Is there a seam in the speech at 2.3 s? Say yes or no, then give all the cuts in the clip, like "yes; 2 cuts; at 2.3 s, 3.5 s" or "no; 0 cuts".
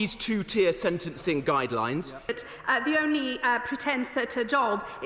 yes; 1 cut; at 2.3 s